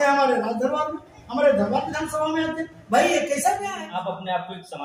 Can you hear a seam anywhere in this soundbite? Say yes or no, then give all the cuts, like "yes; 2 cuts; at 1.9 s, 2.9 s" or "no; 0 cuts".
yes; 1 cut; at 3.7 s